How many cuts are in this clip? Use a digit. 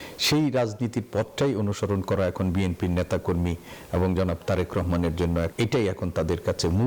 1